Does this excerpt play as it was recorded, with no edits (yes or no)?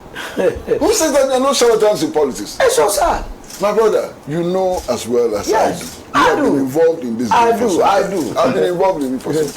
no